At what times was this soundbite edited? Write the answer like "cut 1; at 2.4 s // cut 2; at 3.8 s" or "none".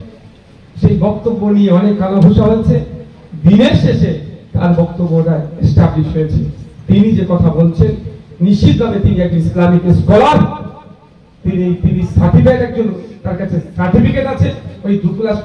none